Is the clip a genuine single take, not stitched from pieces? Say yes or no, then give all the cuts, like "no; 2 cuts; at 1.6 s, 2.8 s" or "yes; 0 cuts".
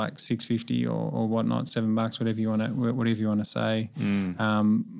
yes; 0 cuts